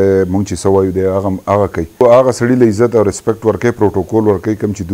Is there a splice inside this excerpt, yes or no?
yes